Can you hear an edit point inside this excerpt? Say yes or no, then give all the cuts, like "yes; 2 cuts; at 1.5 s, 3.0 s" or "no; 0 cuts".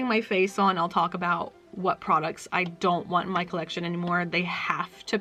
no; 0 cuts